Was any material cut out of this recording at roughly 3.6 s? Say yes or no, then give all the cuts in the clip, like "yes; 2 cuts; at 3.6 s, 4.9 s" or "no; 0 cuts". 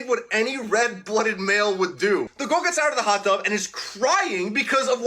no; 1 cut; at 2.3 s